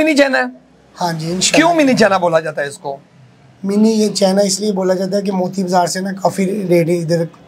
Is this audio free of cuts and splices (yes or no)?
yes